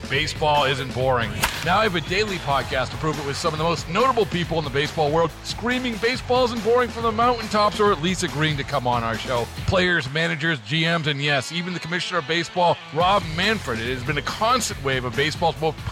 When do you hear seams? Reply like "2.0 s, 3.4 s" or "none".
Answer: none